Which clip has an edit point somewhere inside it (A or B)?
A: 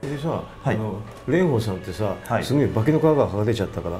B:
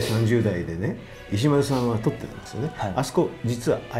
B